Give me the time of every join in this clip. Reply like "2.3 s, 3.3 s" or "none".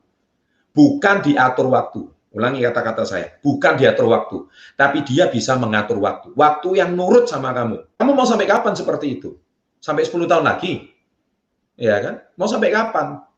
8.0 s